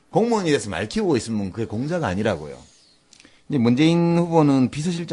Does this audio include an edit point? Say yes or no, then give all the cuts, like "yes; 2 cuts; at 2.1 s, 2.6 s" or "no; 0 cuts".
yes; 1 cut; at 2.4 s